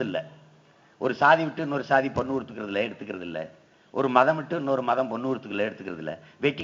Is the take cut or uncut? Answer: uncut